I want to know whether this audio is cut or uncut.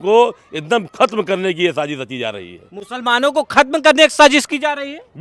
uncut